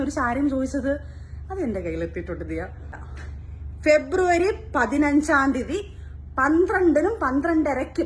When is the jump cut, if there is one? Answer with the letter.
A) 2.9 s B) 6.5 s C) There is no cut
A